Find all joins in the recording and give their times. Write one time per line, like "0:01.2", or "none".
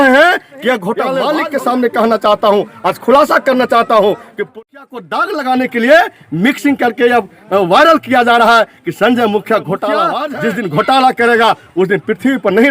0:01.2
0:04.6
0:10.2